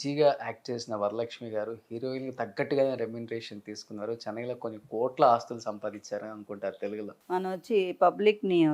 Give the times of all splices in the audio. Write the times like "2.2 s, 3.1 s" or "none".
7.1 s